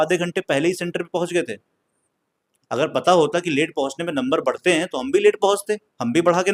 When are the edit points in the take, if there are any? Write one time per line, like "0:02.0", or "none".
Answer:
none